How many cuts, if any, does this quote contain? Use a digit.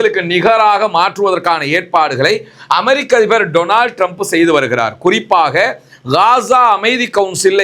0